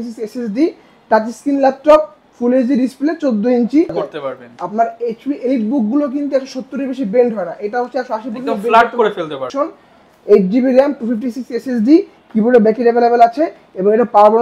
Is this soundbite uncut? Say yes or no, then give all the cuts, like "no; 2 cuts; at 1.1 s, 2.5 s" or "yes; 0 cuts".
no; 2 cuts; at 4.0 s, 9.4 s